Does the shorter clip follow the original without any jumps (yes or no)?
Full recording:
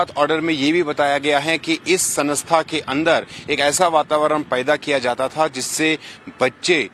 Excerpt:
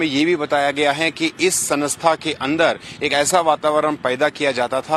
yes